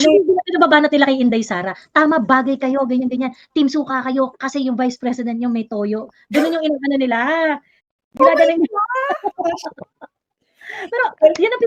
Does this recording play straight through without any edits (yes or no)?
yes